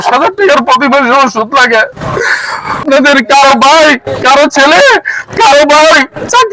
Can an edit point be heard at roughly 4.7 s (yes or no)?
no